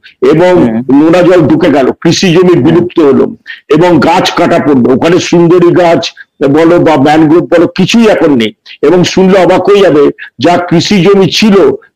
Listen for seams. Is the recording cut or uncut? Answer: uncut